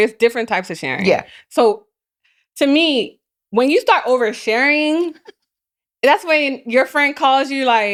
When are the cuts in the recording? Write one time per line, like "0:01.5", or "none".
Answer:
none